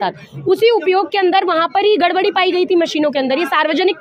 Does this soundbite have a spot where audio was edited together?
no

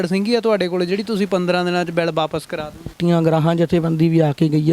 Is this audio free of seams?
no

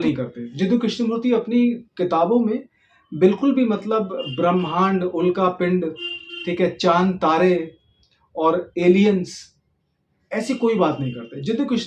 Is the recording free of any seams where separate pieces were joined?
yes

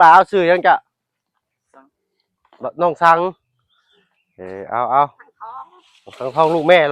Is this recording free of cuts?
yes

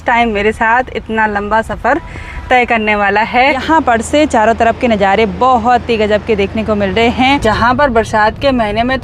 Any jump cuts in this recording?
yes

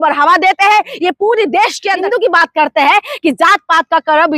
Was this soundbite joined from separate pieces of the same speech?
yes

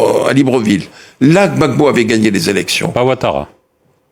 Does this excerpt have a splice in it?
no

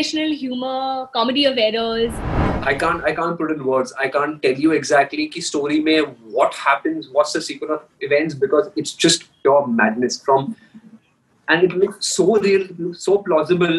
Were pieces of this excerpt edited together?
yes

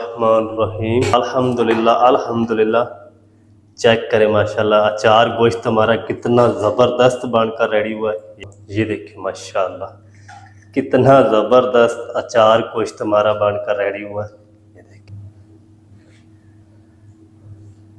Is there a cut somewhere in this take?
yes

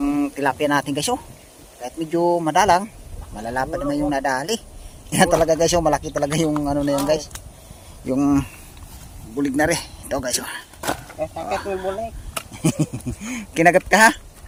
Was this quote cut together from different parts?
no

